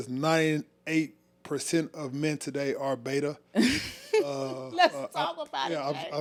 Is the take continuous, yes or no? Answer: yes